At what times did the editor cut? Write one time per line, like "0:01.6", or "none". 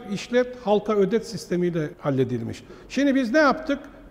0:02.6